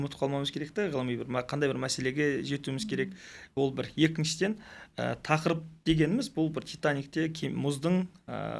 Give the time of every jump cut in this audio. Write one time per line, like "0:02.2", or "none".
none